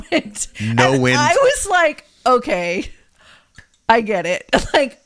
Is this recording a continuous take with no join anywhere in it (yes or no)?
yes